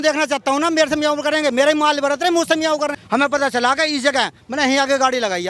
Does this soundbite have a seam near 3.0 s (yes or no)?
yes